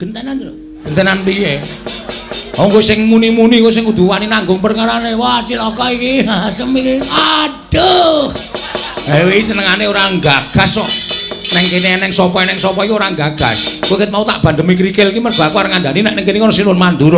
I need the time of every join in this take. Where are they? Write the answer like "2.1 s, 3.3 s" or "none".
0.9 s, 7.2 s